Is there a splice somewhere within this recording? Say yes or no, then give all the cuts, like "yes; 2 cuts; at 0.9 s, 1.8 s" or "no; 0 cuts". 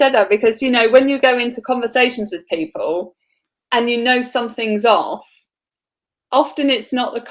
no; 0 cuts